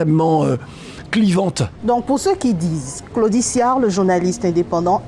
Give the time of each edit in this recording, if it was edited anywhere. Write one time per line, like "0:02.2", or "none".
0:01.6